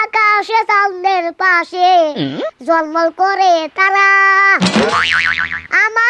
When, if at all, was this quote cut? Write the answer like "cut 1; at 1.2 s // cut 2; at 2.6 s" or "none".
none

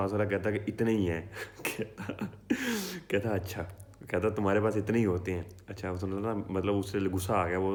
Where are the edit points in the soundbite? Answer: none

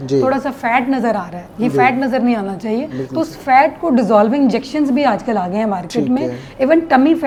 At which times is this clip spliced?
none

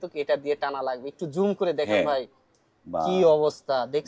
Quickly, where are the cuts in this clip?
none

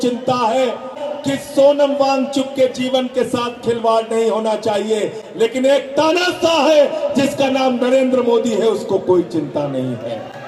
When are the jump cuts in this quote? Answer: cut 1; at 1.0 s

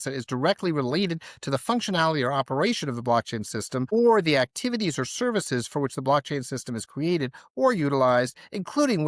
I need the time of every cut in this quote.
cut 1; at 3.9 s

